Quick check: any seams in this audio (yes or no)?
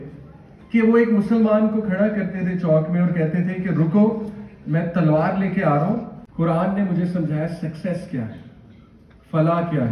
yes